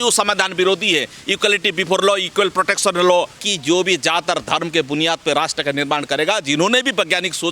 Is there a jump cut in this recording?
yes; 1 cut; at 3.5 s

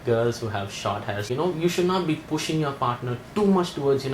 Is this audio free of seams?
no; 1 cut; at 1.3 s

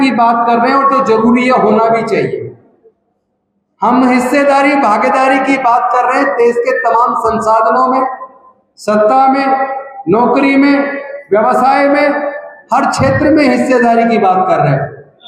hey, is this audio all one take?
yes; 0 cuts

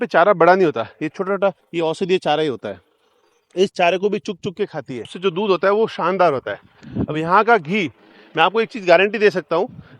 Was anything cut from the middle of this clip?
yes; 2 cuts; at 1.6 s, 5.1 s

